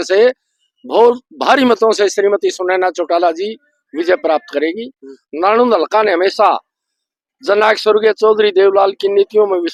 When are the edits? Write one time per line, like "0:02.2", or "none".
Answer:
none